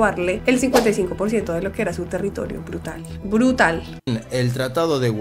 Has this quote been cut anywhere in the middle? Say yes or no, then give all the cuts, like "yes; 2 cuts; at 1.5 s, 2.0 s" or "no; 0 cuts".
no; 0 cuts